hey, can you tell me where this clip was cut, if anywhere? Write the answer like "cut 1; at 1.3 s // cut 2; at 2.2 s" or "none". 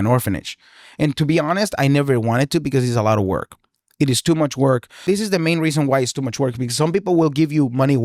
cut 1; at 5.0 s